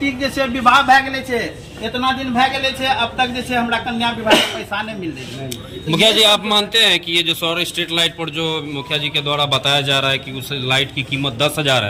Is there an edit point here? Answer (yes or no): no